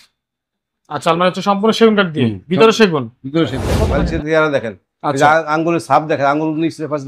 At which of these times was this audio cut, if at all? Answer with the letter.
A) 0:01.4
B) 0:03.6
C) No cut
B